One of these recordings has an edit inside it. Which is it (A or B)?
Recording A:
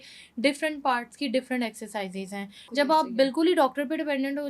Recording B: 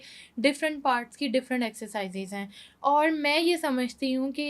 A